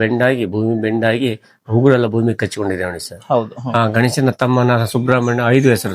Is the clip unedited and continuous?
yes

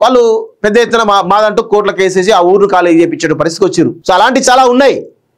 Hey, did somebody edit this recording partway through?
yes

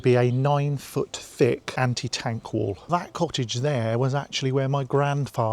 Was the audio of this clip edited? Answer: yes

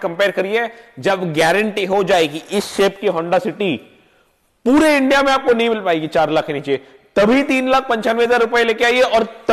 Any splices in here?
no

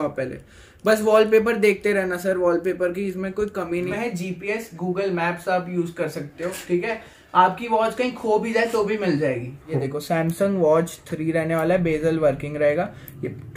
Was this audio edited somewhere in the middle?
yes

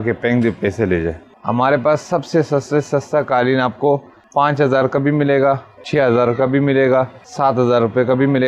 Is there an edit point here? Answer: yes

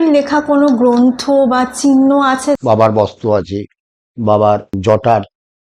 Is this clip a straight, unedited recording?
no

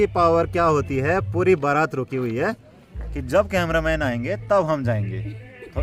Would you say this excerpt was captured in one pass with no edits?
yes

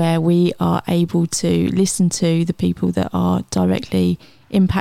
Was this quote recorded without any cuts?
yes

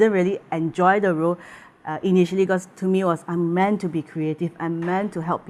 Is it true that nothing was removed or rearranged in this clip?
yes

